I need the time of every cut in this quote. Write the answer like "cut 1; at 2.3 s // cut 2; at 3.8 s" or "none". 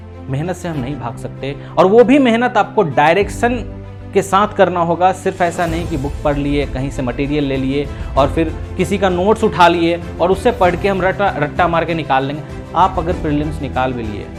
none

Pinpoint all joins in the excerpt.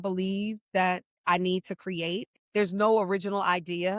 cut 1; at 1.1 s // cut 2; at 2.3 s

